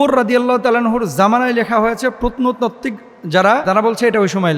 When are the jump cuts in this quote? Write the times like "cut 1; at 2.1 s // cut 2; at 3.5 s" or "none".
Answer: cut 1; at 3.6 s